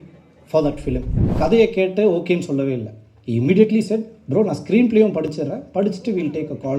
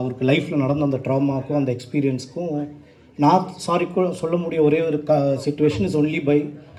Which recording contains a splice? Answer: first; 1 cut; at 1.2 s

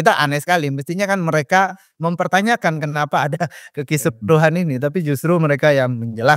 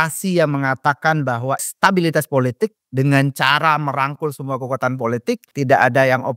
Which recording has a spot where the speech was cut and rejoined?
second; 2 cuts; at 1.7 s, 5.5 s

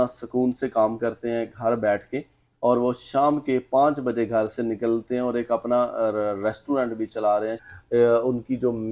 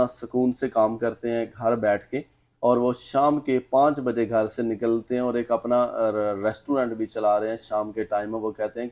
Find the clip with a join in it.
first; 1 cut; at 7.6 s

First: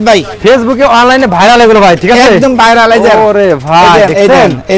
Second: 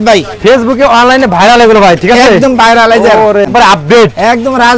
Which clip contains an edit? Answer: second; 1 cut; at 3.5 s

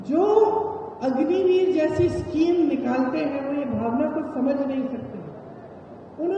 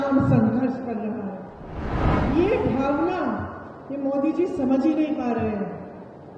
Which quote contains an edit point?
second; 1 cut; at 1.8 s

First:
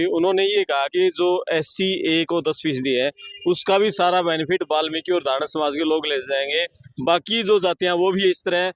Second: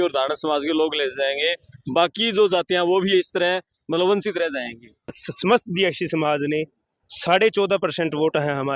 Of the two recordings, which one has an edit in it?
second; 1 cut; at 5.2 s

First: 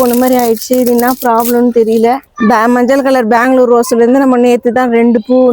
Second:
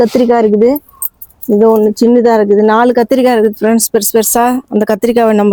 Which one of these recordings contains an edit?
first; 1 cut; at 2.2 s

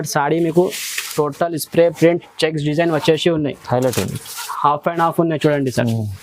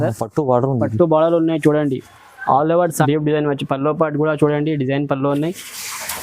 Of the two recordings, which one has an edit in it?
second; 1 cut; at 3.0 s

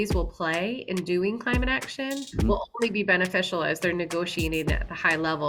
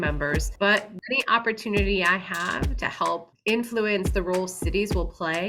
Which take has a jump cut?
second; 2 cuts; at 0.9 s, 3.3 s

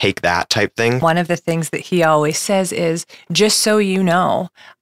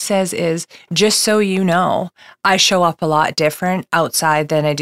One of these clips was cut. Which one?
first; 1 cut; at 1.0 s

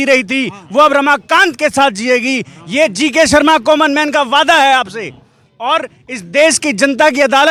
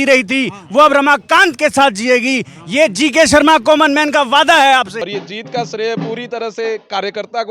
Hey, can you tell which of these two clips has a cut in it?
second; 1 cut; at 5.0 s

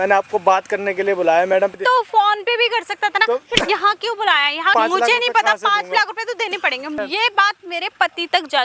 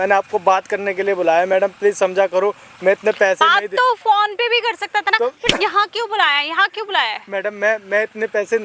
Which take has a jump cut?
first; 3 cuts; at 1.7 s, 4.7 s, 6.9 s

